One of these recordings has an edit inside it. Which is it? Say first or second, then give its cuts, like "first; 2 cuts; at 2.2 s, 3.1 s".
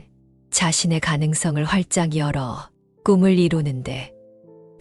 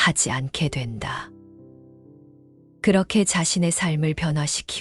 second; 2 cuts; at 1.3 s, 2.8 s